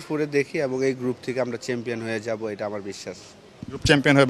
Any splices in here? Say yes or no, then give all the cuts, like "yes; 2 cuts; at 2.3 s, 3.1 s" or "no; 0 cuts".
no; 0 cuts